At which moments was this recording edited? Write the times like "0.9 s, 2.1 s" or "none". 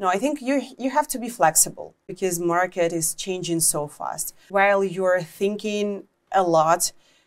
2.0 s, 4.4 s